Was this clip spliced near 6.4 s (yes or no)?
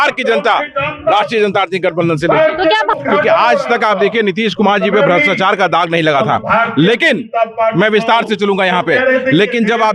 no